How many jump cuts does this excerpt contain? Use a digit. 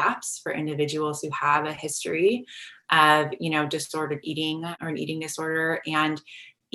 1